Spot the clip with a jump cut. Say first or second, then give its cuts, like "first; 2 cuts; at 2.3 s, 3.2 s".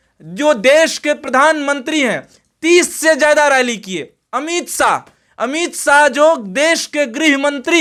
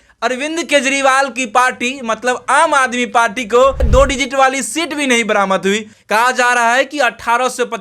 second; 2 cuts; at 3.8 s, 5.9 s